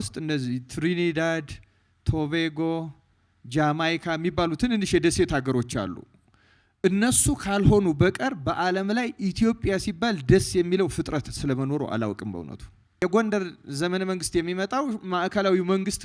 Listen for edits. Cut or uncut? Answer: cut